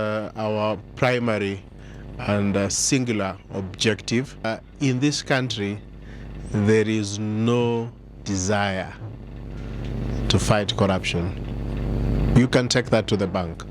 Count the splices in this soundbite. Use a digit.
1